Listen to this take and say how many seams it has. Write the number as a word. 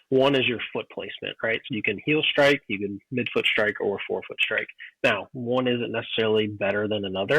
one